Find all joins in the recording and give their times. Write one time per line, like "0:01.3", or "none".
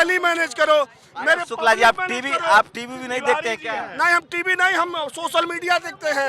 none